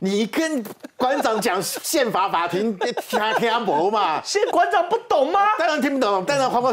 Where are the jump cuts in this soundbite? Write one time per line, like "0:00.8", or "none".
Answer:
0:04.5

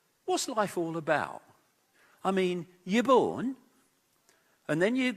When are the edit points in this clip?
none

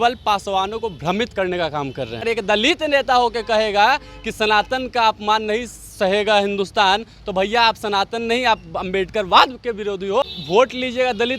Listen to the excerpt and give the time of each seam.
0:02.2
0:10.2

